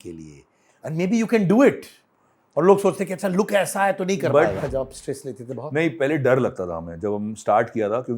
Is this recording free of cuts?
no; 1 cut; at 4.6 s

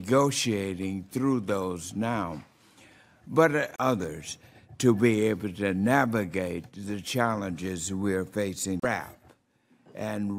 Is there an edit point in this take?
no; 0 cuts

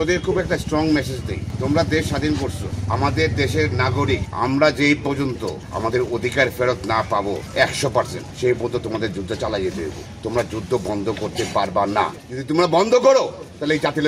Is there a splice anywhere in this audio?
yes; 7 cuts; at 1.5 s, 2.7 s, 4.3 s, 5.6 s, 7.9 s, 10.1 s, 12.3 s

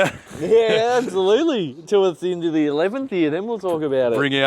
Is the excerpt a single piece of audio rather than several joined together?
yes; 0 cuts

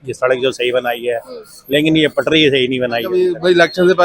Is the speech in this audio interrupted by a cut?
yes; 1 cut; at 3.1 s

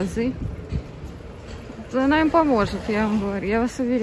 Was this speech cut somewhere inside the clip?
no; 0 cuts

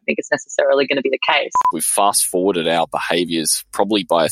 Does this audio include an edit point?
yes; 1 cut; at 1.8 s

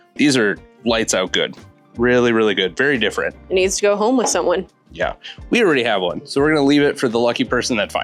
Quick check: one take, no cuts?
yes; 0 cuts

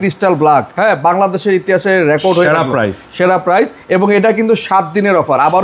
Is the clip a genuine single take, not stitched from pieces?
yes; 0 cuts

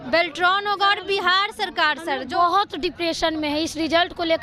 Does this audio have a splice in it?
no; 0 cuts

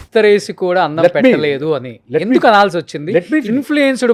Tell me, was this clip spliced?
no; 0 cuts

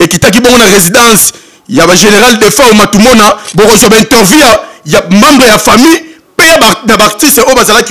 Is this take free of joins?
no; 1 cut; at 3.4 s

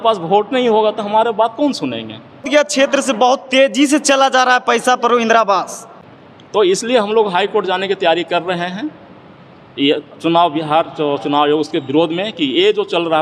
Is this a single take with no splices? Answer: yes; 0 cuts

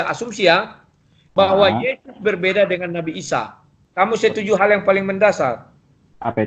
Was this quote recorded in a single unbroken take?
no; 1 cut; at 3.8 s

